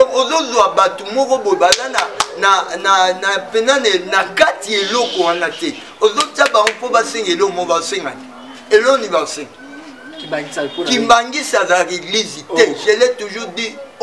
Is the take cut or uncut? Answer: uncut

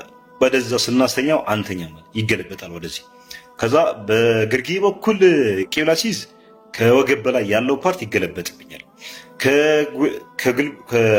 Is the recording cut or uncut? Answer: uncut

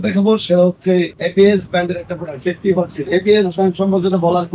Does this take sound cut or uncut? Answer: cut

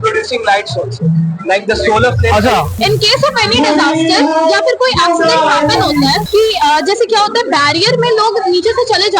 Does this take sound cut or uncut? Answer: cut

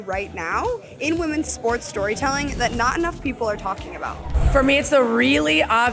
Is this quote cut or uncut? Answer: cut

